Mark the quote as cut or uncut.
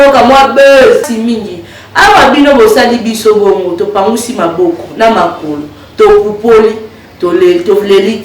cut